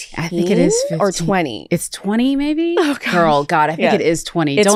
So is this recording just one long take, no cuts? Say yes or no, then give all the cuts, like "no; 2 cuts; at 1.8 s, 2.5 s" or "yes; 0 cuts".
yes; 0 cuts